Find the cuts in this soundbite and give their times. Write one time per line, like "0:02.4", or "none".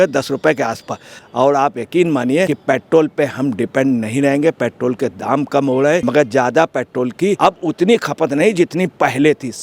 0:01.2
0:02.6
0:06.0
0:07.4